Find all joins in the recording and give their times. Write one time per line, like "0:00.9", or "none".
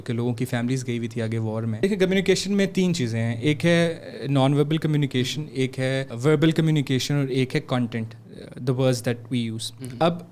0:01.8
0:06.1